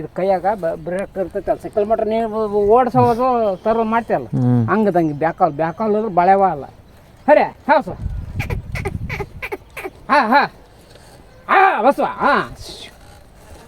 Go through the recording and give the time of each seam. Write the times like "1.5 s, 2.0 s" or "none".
none